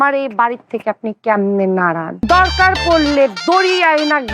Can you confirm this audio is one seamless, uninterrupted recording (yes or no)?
no